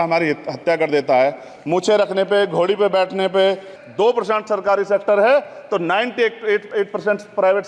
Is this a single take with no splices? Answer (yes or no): no